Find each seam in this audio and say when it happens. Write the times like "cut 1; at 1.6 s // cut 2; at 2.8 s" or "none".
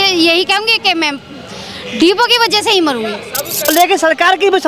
cut 1; at 3.7 s

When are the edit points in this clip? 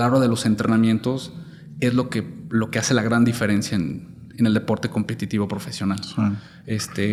none

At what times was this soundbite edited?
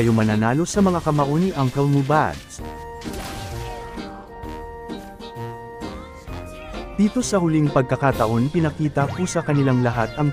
none

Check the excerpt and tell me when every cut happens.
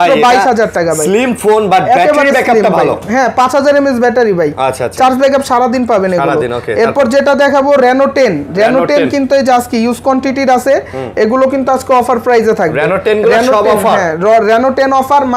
none

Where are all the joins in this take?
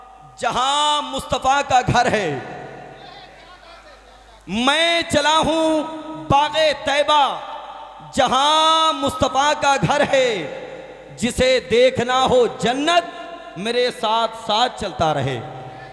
none

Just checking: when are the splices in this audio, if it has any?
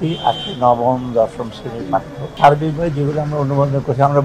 cut 1; at 2.2 s

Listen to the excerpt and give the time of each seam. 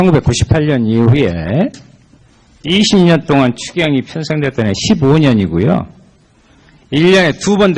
cut 1; at 4.1 s

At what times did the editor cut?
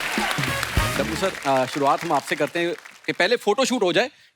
cut 1; at 0.9 s

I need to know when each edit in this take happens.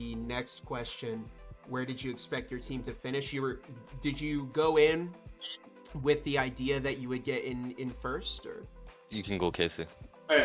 none

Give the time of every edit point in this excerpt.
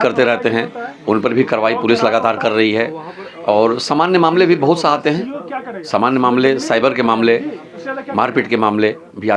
none

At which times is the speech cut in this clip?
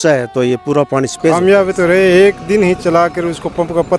cut 1; at 1.3 s

